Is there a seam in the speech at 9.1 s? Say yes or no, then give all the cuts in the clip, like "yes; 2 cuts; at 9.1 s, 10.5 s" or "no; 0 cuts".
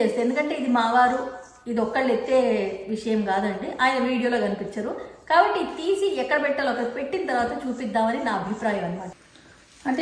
yes; 1 cut; at 9.1 s